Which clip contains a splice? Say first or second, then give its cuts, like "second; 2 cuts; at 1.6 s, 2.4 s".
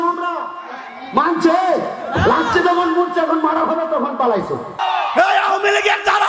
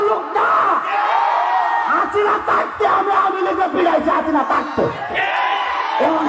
first; 1 cut; at 4.8 s